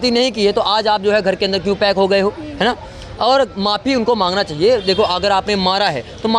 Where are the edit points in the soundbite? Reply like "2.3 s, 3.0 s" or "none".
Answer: none